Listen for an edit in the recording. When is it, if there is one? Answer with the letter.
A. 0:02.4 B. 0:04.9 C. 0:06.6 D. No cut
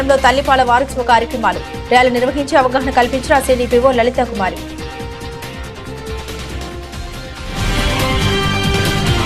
B